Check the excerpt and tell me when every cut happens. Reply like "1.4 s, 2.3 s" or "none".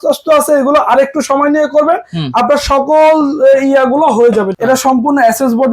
4.5 s